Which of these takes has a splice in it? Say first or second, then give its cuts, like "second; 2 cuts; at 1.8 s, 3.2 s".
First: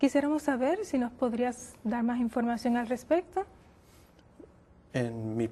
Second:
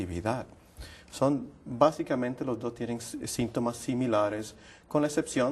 first; 1 cut; at 2.7 s